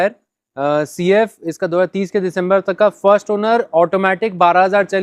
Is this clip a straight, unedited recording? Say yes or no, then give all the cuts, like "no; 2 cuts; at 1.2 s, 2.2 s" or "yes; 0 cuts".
yes; 0 cuts